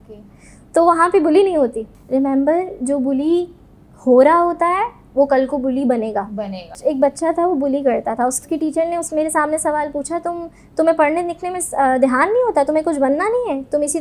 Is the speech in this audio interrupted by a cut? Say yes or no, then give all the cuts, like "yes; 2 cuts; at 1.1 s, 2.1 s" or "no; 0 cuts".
yes; 3 cuts; at 1.9 s, 6.8 s, 8.4 s